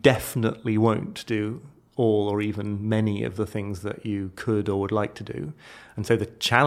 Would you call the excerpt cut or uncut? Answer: uncut